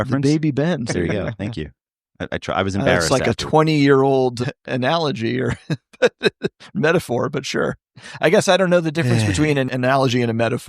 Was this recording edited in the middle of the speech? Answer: yes; 1 cut; at 9.7 s

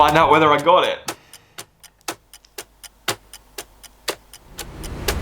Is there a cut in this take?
yes; 1 cut; at 1.0 s

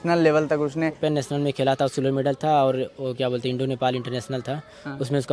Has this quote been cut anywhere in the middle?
yes; 1 cut; at 1.0 s

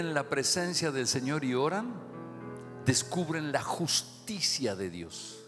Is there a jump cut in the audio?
no; 0 cuts

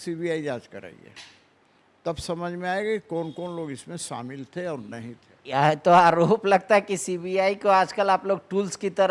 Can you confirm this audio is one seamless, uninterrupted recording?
yes; 0 cuts

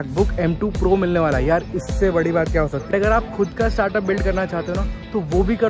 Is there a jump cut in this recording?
yes; 1 cut; at 2.9 s

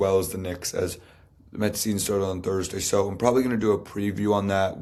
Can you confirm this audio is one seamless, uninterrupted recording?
yes; 0 cuts

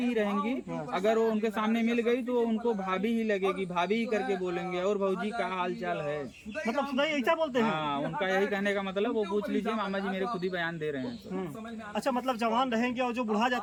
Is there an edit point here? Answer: no; 0 cuts

